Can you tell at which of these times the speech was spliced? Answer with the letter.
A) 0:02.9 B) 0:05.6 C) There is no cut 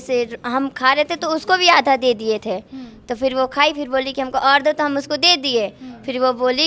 C